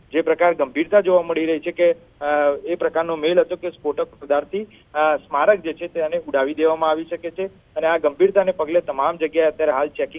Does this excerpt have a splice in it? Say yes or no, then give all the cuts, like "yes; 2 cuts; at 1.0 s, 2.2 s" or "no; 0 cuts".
yes; 1 cut; at 5.1 s